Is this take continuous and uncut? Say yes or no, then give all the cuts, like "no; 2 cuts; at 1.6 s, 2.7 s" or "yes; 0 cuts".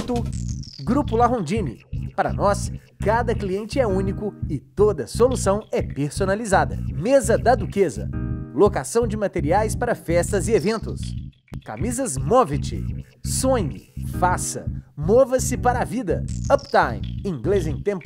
yes; 0 cuts